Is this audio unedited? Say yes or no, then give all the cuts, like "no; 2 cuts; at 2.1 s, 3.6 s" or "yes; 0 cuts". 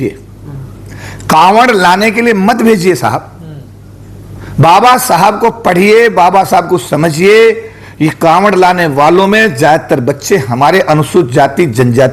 yes; 0 cuts